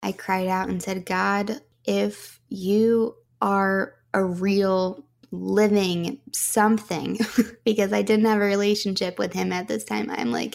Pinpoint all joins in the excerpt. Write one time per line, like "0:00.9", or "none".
0:01.7
0:03.6